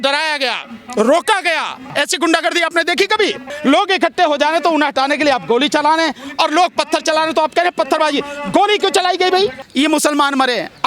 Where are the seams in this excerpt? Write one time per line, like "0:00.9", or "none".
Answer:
0:01.8
0:03.5
0:09.6